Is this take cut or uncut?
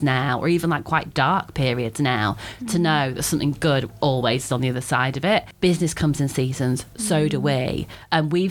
uncut